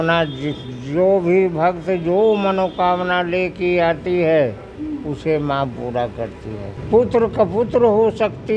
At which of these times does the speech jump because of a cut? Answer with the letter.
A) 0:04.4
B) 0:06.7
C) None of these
B